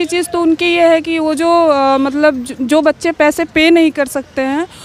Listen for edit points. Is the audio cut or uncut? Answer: uncut